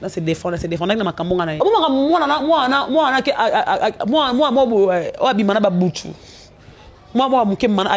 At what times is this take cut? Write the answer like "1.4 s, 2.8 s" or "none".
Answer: 1.5 s

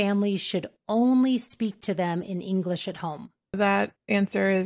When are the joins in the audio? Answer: 3.6 s

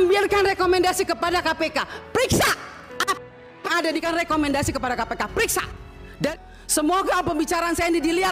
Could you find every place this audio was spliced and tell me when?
4.0 s, 6.3 s

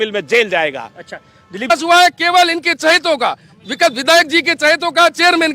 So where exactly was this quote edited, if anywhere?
1.7 s

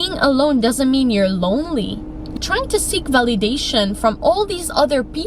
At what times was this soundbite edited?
2.3 s

